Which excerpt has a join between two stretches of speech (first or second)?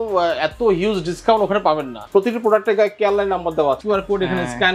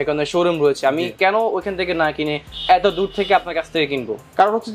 first